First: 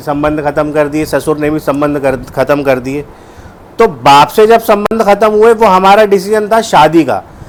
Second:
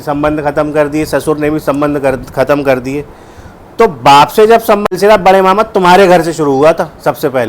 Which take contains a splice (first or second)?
second